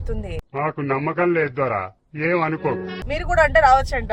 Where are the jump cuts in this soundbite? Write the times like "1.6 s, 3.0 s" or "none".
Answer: 3.0 s